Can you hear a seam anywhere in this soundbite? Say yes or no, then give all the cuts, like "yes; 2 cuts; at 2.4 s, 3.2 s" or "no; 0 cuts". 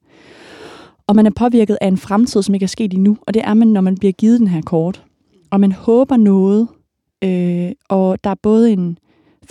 no; 0 cuts